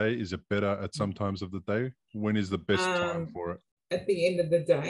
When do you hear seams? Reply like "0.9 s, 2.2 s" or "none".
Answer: 3.7 s

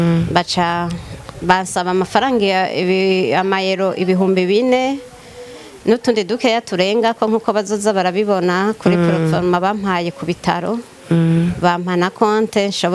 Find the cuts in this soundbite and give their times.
none

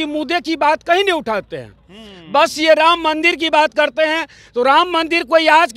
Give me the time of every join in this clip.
none

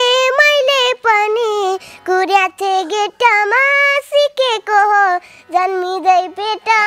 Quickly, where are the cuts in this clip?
none

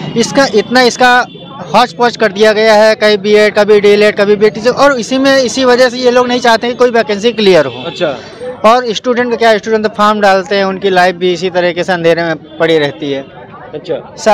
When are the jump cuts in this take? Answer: none

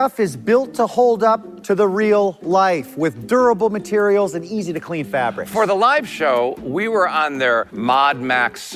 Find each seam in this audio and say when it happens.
none

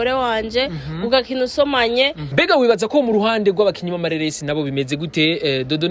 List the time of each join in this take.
2.2 s

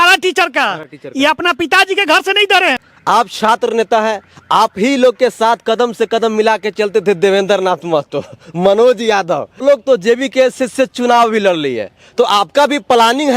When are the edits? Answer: 2.9 s, 9.6 s

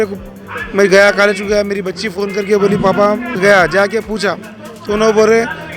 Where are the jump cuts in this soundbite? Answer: 3.3 s

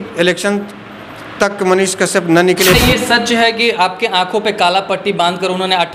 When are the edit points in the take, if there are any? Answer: 2.7 s

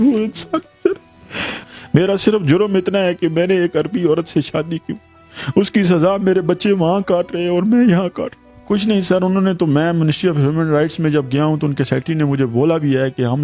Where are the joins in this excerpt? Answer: 1.5 s, 8.5 s

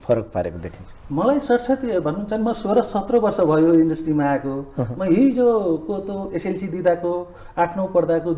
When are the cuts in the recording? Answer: none

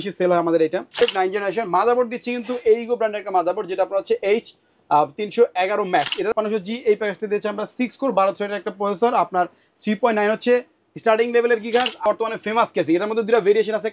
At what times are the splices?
1.0 s, 6.3 s, 12.0 s

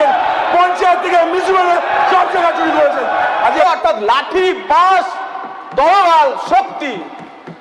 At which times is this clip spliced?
3.4 s

